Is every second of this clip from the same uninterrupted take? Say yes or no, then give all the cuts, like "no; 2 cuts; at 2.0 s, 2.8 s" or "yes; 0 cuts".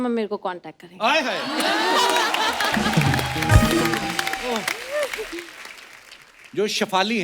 yes; 0 cuts